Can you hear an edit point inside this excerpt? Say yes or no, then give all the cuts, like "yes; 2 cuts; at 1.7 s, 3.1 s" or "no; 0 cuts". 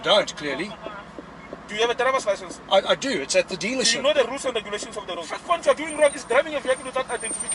yes; 1 cut; at 5.3 s